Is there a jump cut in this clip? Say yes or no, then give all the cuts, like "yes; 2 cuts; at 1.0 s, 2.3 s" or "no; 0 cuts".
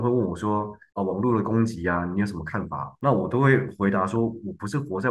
yes; 1 cut; at 2.8 s